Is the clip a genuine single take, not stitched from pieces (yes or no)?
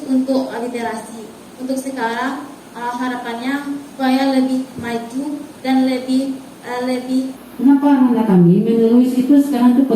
no